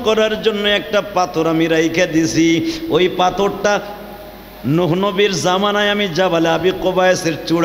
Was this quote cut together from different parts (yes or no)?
no